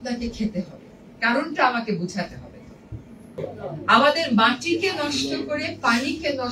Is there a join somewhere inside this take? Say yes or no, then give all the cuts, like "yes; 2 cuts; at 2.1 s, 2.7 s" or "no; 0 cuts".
yes; 1 cut; at 3.2 s